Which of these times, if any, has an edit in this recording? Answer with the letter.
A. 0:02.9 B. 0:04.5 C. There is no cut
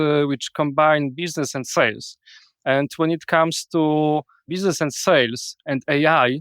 B